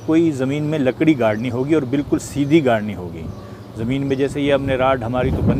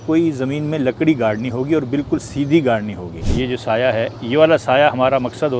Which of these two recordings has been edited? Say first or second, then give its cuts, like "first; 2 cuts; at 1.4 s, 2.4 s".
second; 1 cut; at 3.3 s